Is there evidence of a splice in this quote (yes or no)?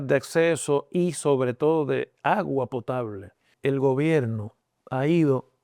yes